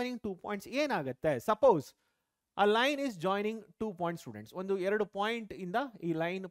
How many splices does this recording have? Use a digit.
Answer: 0